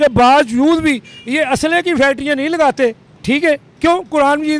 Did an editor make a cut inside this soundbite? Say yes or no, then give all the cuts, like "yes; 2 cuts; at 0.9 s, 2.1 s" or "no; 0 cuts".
no; 0 cuts